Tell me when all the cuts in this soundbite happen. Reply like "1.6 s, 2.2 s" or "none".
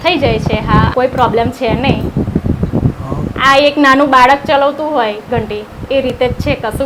0.9 s